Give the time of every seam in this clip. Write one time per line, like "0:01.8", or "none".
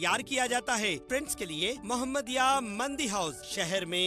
0:01.0